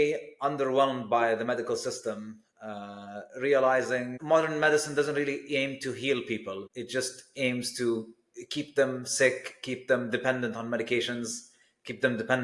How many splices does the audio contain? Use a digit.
2